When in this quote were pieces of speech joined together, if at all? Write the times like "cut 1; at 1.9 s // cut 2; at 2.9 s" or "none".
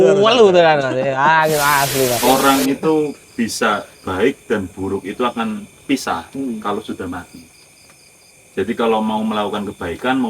cut 1; at 2.2 s